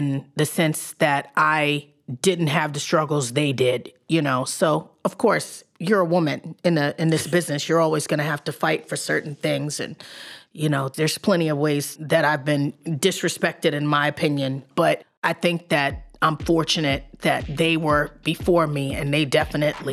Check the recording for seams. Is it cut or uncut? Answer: cut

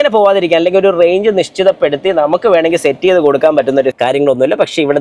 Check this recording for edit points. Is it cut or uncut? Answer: cut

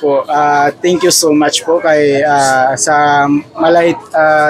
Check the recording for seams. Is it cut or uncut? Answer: uncut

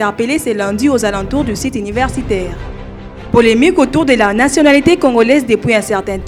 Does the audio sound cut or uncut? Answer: uncut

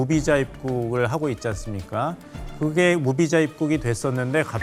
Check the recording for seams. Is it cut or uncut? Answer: uncut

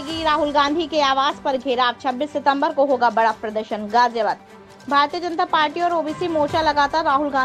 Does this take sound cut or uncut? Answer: uncut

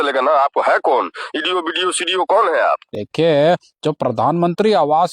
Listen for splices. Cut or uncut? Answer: uncut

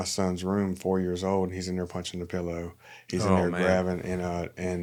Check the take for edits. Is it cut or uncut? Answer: uncut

